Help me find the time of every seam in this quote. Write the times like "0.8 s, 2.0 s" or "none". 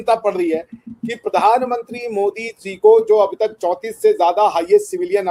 none